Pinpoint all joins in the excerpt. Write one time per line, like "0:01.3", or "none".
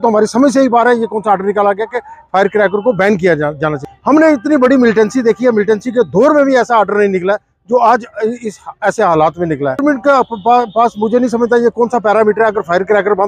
0:03.9
0:09.8